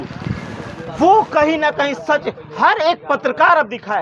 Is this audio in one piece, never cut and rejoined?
yes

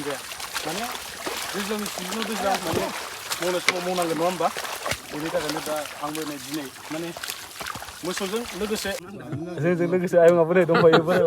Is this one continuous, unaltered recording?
no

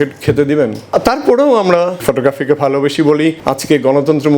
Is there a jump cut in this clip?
yes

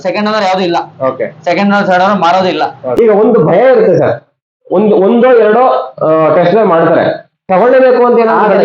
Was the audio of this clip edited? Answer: yes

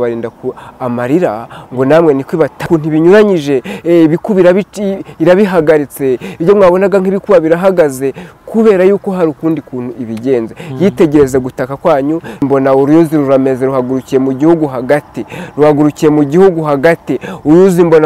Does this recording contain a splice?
yes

